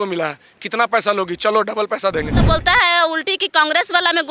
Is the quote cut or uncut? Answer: cut